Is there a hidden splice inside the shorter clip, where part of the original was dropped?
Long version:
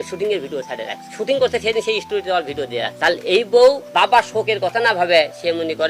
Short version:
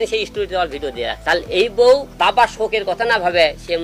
no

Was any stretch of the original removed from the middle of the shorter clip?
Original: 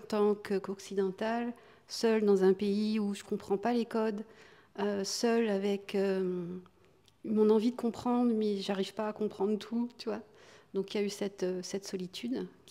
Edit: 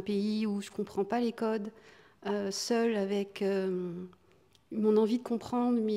no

